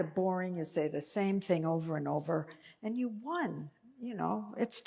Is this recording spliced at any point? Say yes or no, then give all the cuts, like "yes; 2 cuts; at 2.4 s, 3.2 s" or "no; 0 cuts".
yes; 1 cut; at 3.0 s